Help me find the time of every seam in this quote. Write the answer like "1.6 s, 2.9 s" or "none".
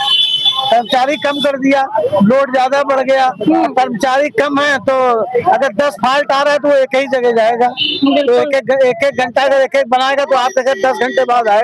none